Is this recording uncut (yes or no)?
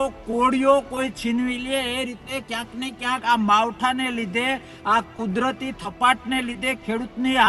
yes